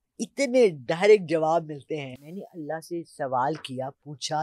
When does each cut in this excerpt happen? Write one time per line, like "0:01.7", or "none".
0:02.1